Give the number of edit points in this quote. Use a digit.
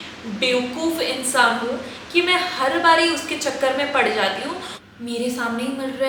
1